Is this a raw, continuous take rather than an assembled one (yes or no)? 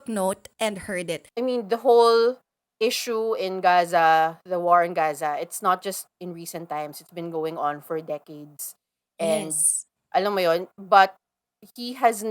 no